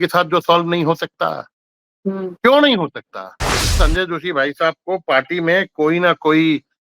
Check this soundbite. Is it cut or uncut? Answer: cut